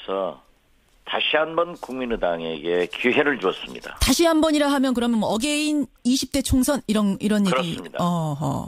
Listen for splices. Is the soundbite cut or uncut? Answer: cut